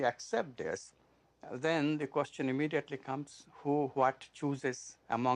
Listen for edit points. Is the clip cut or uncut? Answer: cut